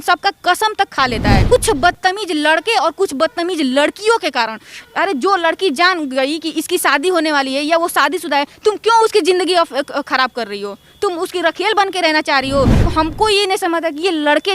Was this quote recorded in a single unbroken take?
no; 2 cuts; at 1.4 s, 12.9 s

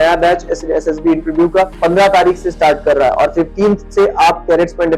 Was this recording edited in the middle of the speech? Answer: yes; 1 cut; at 1.7 s

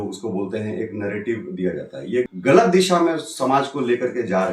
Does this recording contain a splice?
yes; 1 cut; at 2.3 s

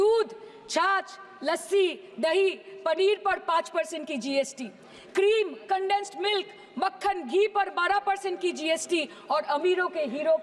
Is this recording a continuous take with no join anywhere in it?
yes; 0 cuts

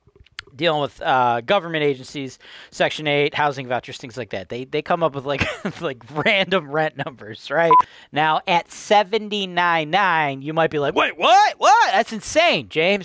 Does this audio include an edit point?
yes; 1 cut; at 8.0 s

